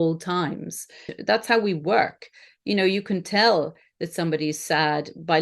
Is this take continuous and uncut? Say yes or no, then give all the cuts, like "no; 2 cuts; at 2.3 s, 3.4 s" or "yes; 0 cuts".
no; 1 cut; at 1.1 s